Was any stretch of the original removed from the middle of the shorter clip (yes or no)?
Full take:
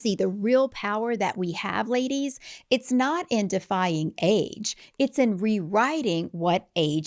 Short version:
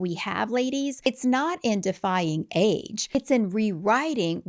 yes